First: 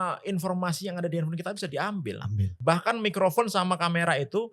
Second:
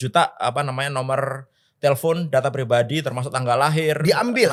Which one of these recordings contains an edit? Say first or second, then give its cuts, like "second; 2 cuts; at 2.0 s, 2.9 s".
first; 1 cut; at 2.5 s